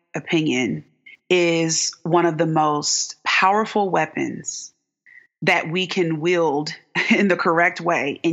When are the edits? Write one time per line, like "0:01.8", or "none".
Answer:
none